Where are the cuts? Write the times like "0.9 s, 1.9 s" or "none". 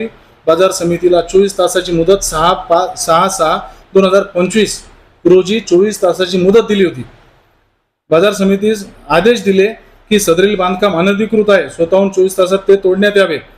none